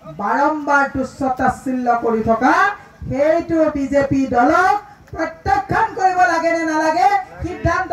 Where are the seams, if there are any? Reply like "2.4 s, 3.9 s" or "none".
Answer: none